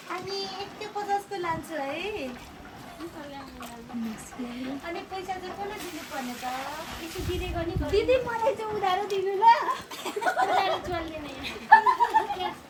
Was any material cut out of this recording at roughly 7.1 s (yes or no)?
no